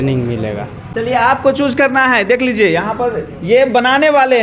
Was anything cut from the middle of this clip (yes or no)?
no